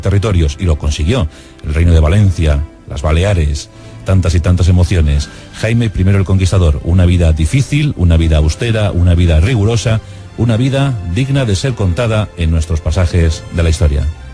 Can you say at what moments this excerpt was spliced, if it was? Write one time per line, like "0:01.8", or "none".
0:06.4